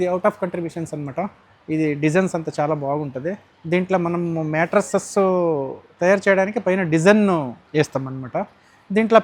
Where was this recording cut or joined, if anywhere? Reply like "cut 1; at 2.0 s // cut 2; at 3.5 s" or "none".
none